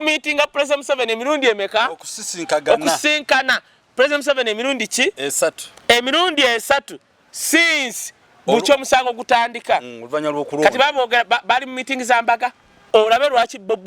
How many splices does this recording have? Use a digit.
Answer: 1